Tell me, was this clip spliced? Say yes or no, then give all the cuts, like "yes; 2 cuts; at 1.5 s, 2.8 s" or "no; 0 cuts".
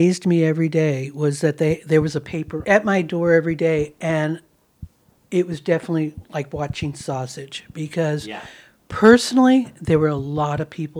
yes; 1 cut; at 2.5 s